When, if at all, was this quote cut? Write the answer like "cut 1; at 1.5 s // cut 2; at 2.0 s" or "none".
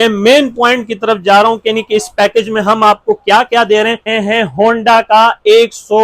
cut 1; at 4.1 s